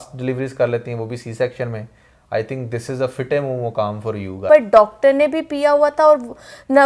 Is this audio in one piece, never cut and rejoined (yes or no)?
no